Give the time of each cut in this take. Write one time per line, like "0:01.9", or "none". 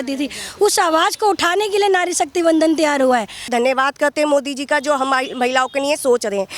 0:03.5